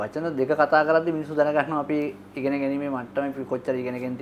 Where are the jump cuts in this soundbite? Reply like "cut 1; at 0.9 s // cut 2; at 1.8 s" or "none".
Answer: none